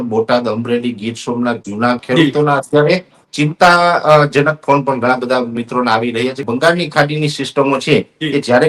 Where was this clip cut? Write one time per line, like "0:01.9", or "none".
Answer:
0:02.0
0:06.5